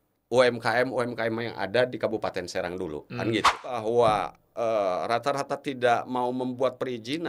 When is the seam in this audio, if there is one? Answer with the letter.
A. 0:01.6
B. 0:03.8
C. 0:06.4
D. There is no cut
B